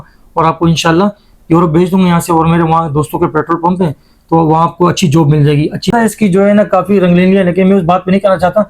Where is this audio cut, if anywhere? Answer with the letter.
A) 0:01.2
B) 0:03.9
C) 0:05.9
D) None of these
C